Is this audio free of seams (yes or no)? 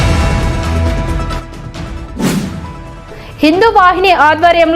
no